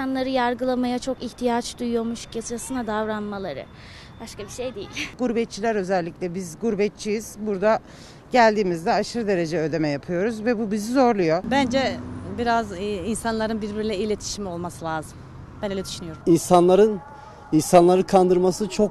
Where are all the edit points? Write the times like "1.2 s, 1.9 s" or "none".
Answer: 5.1 s, 11.4 s, 16.2 s